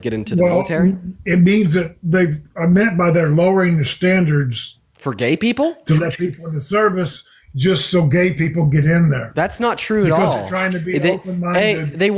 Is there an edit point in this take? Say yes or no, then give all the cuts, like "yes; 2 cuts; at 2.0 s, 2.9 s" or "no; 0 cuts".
yes; 1 cut; at 1.1 s